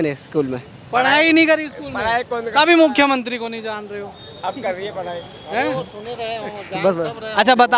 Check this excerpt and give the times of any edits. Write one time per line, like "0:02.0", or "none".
none